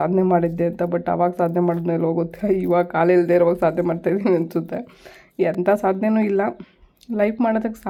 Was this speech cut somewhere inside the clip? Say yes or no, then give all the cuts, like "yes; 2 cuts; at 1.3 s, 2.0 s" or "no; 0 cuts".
no; 0 cuts